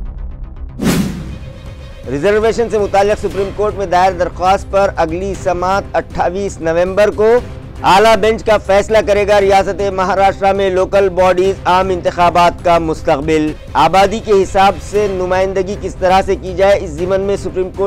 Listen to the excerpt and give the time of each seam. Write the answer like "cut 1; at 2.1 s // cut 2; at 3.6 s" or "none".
cut 1; at 1.0 s